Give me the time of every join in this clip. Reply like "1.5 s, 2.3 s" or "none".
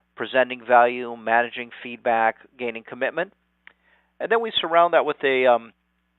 1.2 s